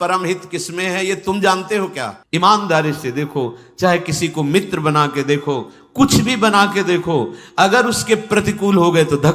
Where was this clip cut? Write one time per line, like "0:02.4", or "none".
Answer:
0:02.1